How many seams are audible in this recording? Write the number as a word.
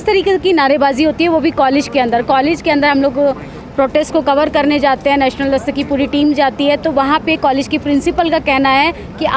zero